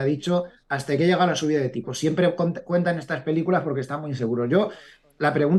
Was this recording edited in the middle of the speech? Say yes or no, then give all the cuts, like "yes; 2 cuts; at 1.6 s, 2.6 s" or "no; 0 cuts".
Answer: no; 0 cuts